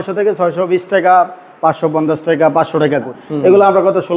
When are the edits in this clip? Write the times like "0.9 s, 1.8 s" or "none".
3.1 s